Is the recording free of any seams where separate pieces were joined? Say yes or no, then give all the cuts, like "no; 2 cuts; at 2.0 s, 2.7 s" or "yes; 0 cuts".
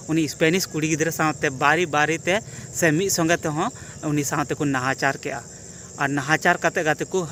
yes; 0 cuts